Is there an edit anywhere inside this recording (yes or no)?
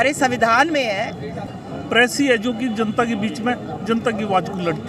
yes